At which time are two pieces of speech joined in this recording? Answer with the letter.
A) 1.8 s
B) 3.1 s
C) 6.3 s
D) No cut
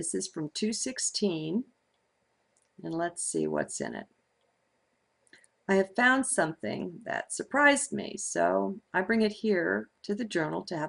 B